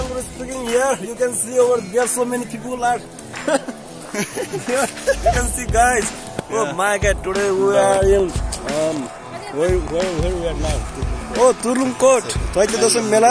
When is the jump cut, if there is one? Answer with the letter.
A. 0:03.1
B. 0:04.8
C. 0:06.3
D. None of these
D